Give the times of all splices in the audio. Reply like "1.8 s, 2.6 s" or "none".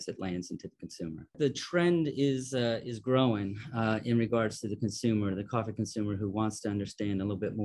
1.3 s